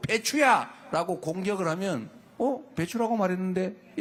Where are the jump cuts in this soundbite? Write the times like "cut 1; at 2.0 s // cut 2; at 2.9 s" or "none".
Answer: none